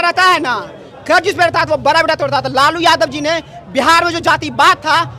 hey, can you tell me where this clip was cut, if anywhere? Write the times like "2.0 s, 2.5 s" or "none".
none